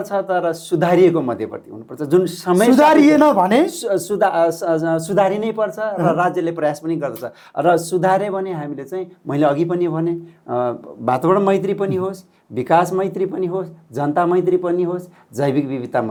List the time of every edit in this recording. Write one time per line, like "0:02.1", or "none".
none